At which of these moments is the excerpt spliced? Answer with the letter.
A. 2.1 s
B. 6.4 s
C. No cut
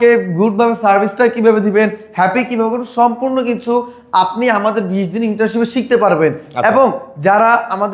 C